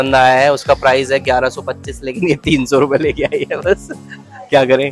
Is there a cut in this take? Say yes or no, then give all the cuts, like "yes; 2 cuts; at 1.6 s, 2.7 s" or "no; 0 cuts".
no; 0 cuts